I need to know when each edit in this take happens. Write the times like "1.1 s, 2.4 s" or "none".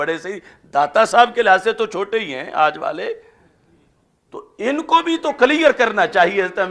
none

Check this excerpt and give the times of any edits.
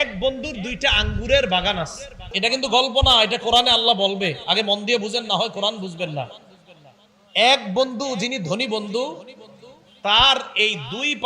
2.3 s

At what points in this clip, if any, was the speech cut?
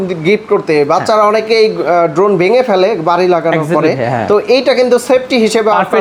none

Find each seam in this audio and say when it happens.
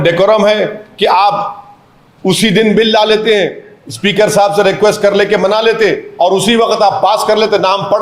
none

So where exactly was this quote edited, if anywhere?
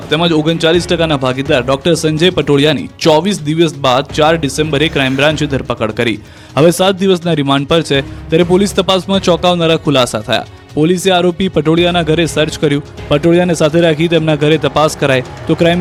none

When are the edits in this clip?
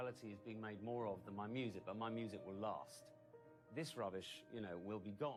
none

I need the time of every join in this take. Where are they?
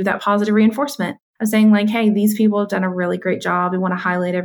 none

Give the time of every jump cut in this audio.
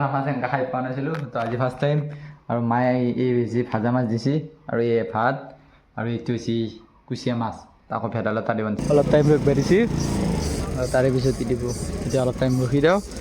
8.8 s

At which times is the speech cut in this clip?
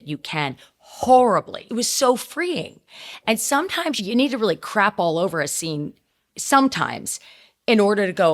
1.6 s, 4.0 s

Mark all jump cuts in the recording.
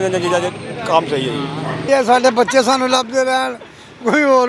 1.9 s

